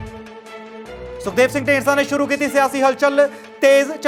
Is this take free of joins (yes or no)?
yes